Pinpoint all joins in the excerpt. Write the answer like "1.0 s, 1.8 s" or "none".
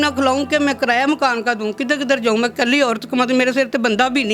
none